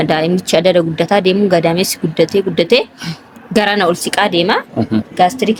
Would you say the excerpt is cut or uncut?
uncut